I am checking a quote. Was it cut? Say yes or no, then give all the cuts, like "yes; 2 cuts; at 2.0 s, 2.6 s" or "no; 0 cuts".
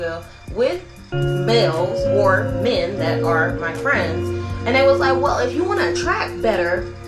yes; 1 cut; at 4.5 s